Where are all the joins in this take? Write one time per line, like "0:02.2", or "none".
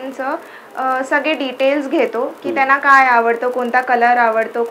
none